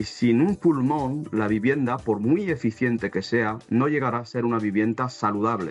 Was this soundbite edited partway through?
no; 0 cuts

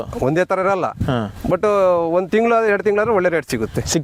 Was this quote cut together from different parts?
no; 0 cuts

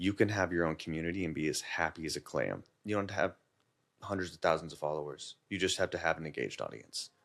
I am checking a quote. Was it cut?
yes; 1 cut; at 2.6 s

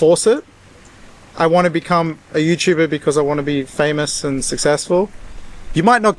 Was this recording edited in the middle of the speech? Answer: no; 0 cuts

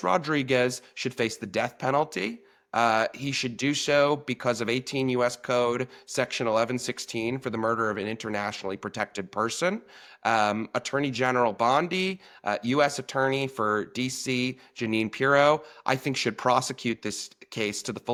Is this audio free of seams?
yes; 0 cuts

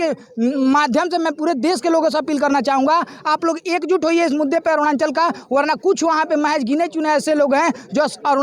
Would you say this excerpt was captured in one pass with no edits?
yes; 0 cuts

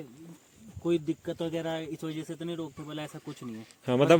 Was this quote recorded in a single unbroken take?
yes; 0 cuts

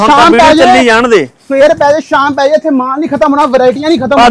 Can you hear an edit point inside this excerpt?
no; 0 cuts

